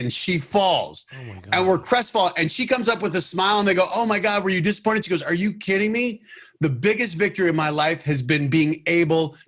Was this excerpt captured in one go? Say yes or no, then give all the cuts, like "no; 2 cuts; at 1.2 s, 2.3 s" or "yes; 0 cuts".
yes; 0 cuts